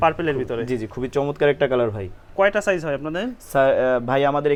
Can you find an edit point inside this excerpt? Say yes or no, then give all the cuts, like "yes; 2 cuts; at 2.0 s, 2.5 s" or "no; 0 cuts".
no; 0 cuts